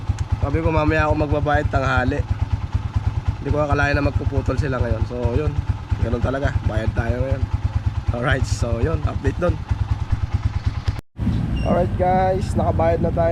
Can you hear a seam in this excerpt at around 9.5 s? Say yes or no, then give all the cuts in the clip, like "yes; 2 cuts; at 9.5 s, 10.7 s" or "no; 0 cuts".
no; 0 cuts